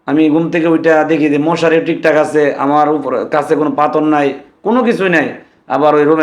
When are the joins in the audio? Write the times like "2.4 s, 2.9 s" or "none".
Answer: none